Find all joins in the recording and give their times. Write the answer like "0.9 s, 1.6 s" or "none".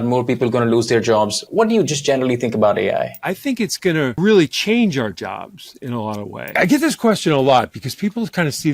3.2 s, 6.5 s